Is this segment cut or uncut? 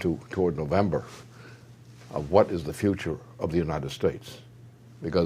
cut